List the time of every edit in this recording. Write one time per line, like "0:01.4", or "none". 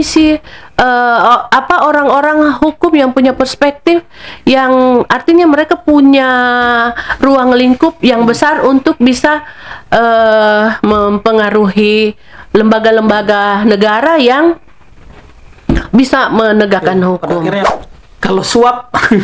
0:17.7